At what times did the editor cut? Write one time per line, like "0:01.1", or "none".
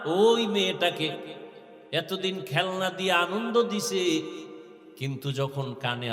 none